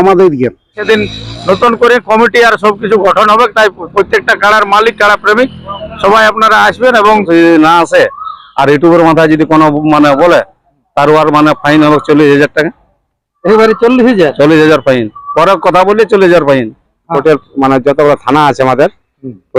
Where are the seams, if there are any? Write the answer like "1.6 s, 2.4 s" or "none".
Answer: 0.8 s, 7.2 s, 17.1 s